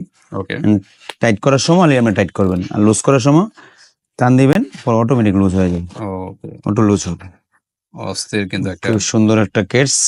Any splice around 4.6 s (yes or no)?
no